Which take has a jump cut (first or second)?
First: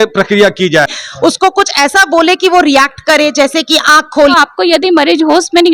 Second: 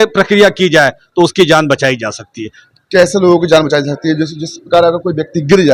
first